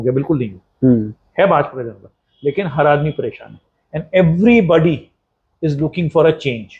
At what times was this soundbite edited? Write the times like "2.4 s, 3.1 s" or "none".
none

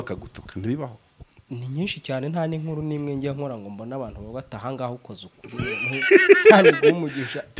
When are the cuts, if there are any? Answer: none

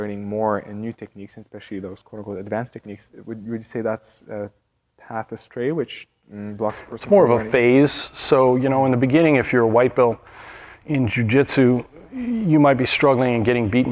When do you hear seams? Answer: none

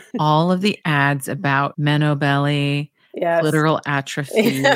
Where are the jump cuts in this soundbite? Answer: none

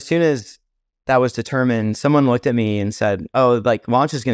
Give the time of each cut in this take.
none

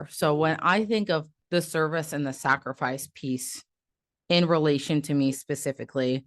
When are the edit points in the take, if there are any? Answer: 1.4 s

